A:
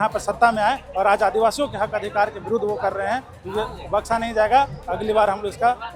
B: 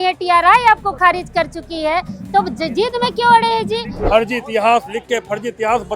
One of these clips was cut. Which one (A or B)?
B